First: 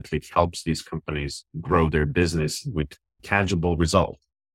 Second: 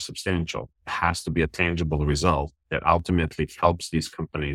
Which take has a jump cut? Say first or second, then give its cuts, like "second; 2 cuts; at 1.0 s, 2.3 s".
first; 1 cut; at 3.2 s